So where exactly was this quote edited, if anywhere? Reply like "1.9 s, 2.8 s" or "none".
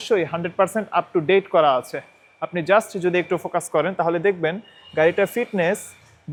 none

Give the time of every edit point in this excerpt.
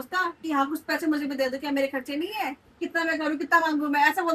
none

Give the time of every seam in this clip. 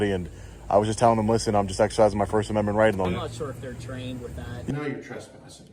3.1 s, 4.7 s

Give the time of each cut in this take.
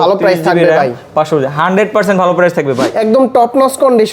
2.9 s

